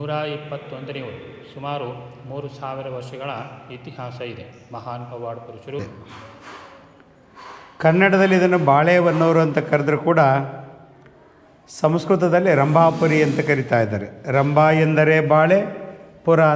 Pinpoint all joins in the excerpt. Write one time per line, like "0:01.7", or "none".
0:05.8